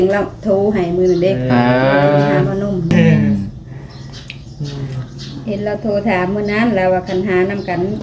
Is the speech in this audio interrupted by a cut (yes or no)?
yes